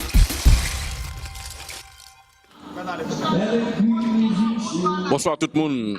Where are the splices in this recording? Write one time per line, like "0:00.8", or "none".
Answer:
0:02.3